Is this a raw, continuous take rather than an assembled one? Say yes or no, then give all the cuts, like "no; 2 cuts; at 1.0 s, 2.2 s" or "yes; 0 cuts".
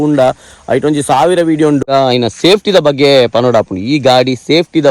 no; 1 cut; at 1.9 s